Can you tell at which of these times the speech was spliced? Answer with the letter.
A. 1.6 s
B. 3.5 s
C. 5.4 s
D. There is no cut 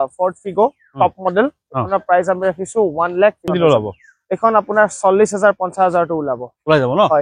B